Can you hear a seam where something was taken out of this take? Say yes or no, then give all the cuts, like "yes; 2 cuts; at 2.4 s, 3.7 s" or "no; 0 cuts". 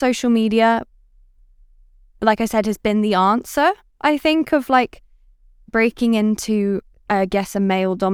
no; 0 cuts